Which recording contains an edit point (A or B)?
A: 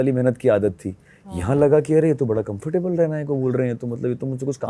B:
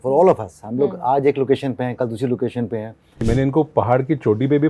B